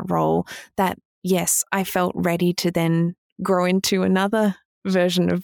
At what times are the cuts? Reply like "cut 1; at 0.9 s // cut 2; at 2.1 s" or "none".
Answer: none